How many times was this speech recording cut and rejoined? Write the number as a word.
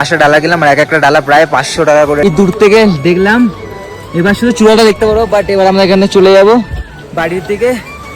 one